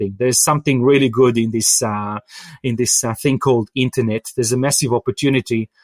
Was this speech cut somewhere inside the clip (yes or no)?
no